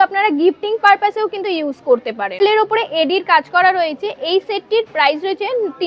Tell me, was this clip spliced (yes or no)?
no